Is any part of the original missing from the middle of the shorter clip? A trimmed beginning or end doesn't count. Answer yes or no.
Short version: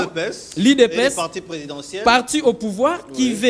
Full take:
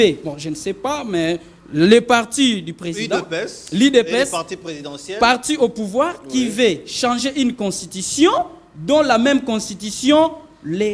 no